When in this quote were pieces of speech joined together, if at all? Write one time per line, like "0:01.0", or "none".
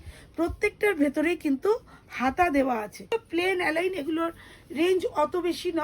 0:03.1